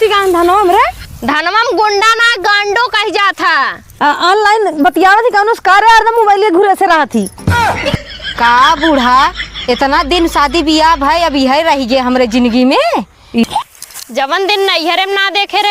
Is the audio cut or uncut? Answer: cut